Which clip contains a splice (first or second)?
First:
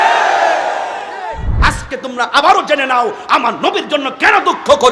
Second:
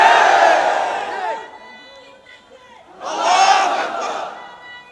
first